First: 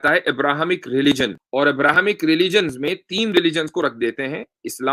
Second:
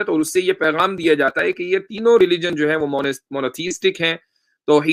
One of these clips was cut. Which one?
first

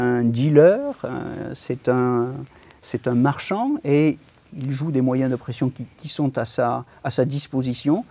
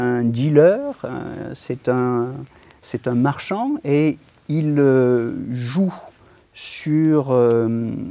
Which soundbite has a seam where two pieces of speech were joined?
first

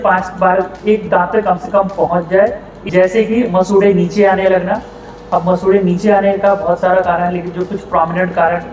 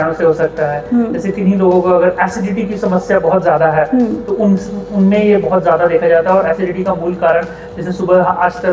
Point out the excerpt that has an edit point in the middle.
first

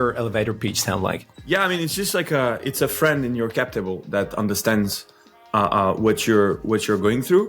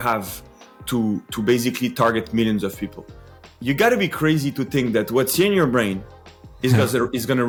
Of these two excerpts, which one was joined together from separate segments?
first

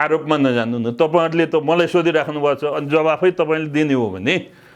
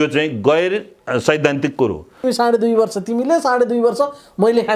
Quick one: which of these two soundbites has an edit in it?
second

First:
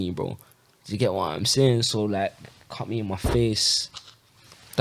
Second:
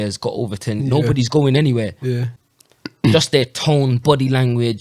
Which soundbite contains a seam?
second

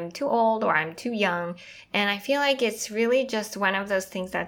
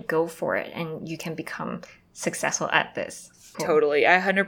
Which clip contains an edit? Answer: second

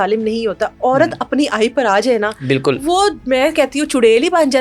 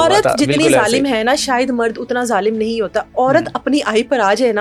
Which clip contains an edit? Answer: first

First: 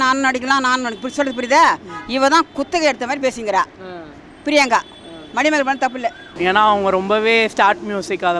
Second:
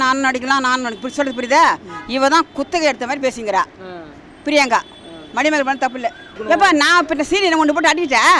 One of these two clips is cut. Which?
first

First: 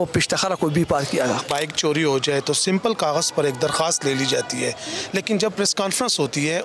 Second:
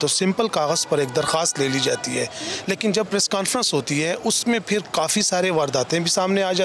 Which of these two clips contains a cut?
first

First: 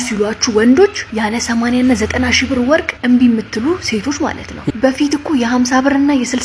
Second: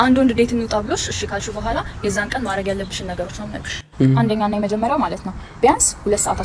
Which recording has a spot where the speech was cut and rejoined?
first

